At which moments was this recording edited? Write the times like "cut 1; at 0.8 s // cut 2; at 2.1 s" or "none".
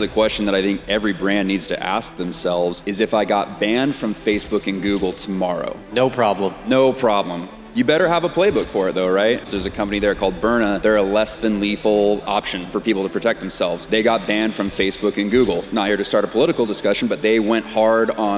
cut 1; at 2.8 s // cut 2; at 5.8 s // cut 3; at 9.4 s // cut 4; at 10.8 s // cut 5; at 12.2 s // cut 6; at 13.8 s // cut 7; at 15.6 s